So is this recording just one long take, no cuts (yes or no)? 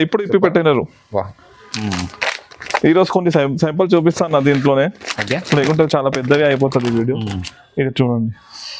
yes